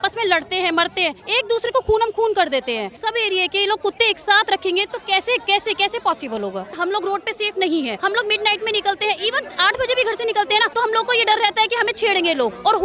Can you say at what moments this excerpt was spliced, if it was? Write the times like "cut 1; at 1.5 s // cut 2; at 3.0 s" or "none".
cut 1; at 1.2 s // cut 2; at 3.0 s // cut 3; at 6.8 s // cut 4; at 7.9 s // cut 5; at 10.7 s